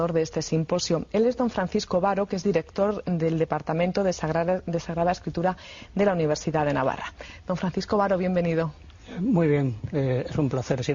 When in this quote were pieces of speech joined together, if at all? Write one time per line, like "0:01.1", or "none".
none